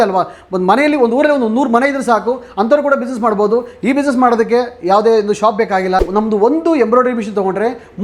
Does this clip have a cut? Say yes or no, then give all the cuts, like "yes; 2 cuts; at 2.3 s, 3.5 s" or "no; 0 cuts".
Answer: yes; 1 cut; at 6.0 s